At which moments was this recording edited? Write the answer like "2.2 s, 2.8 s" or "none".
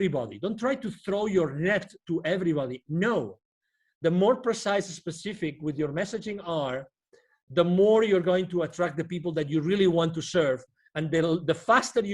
none